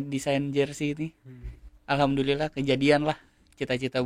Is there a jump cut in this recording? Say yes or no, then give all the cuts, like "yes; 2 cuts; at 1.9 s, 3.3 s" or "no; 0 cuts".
no; 0 cuts